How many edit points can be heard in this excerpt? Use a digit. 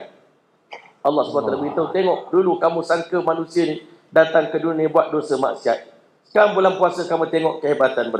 0